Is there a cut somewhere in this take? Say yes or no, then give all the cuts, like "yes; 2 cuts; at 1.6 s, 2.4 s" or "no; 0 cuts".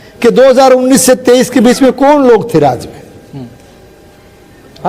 no; 0 cuts